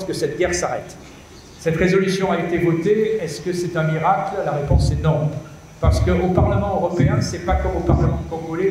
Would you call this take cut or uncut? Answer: uncut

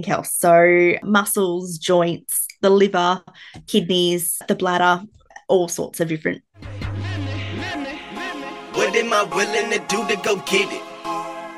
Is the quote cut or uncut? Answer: cut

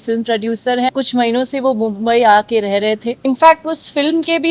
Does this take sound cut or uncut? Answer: cut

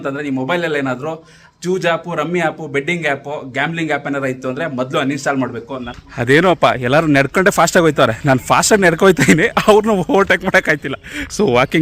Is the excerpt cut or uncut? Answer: cut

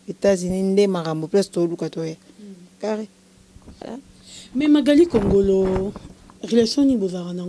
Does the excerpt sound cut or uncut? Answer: cut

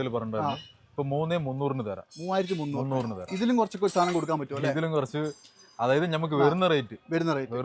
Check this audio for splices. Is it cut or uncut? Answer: uncut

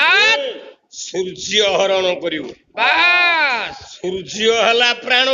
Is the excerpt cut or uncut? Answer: cut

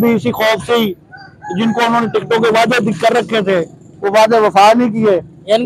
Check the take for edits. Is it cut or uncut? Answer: uncut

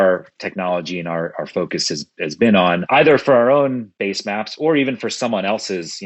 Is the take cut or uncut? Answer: cut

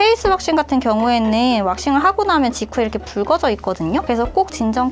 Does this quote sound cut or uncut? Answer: uncut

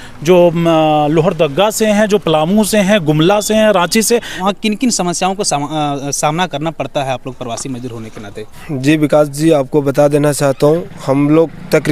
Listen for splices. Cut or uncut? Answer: cut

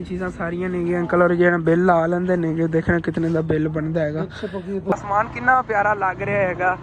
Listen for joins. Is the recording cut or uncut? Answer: cut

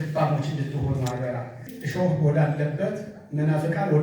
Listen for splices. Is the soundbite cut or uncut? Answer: cut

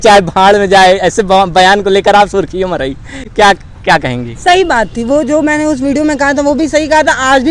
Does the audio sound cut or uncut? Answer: uncut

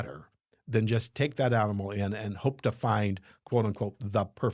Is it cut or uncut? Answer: uncut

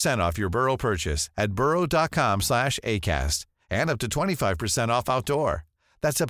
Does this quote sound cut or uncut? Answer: uncut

